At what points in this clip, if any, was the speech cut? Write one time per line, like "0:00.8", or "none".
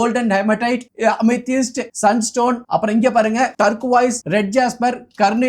0:00.9
0:01.8
0:02.6
0:04.1

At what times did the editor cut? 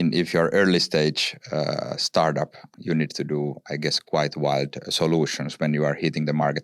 0:02.6

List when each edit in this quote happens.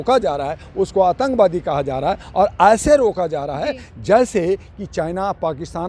none

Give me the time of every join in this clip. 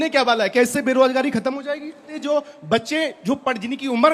0:02.1

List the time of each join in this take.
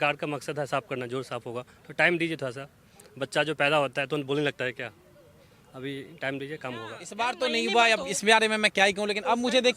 0:07.1

